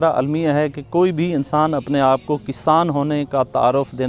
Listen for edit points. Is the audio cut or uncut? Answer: uncut